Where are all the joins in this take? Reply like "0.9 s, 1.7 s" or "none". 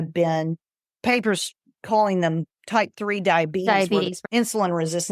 4.1 s

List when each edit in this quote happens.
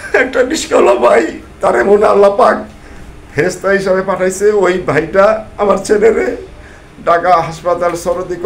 none

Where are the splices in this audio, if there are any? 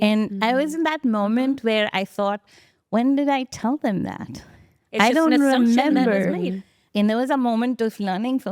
6.9 s

